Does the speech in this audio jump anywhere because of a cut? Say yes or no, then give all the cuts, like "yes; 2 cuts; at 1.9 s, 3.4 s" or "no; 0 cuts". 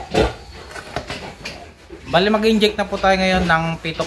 yes; 1 cut; at 1.3 s